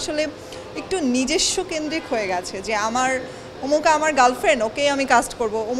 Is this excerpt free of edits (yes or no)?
yes